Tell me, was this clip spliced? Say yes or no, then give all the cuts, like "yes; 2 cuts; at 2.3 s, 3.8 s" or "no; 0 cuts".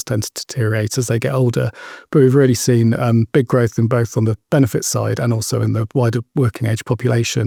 no; 0 cuts